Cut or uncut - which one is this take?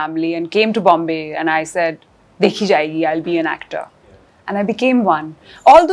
uncut